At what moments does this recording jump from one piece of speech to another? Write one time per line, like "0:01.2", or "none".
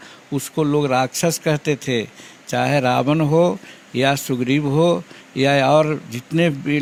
none

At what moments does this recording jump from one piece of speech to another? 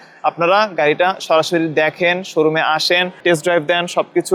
none

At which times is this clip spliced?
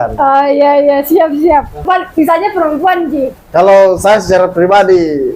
0:01.8

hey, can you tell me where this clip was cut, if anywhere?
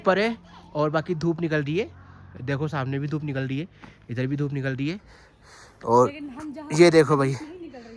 none

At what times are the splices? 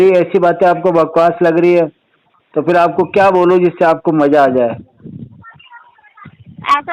none

